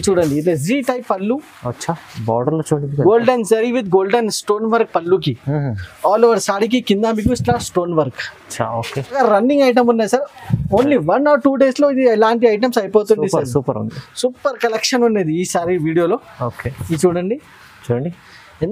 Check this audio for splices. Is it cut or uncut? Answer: cut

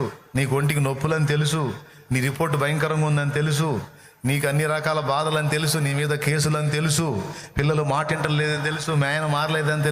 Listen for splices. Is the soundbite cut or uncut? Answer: uncut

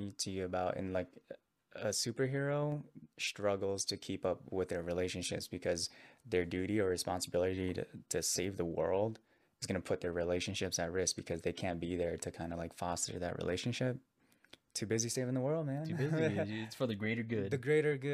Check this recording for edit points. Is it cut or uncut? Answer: uncut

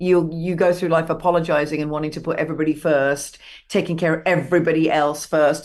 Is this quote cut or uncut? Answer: uncut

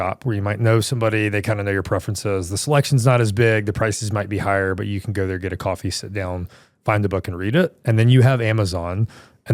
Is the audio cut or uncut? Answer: uncut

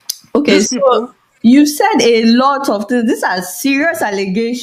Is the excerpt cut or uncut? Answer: uncut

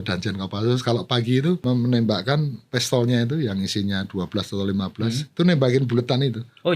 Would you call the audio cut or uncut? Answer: cut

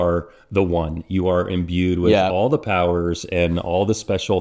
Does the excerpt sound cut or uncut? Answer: uncut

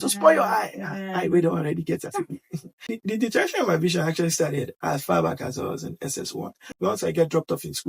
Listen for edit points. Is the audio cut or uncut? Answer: cut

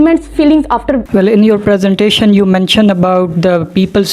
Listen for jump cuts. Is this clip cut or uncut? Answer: cut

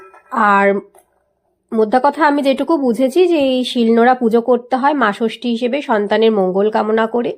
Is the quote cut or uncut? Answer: uncut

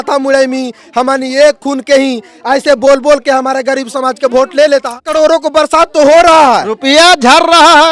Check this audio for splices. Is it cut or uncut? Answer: cut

